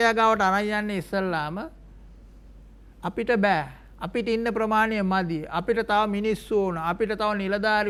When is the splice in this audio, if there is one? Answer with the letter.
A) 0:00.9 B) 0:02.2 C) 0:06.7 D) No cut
D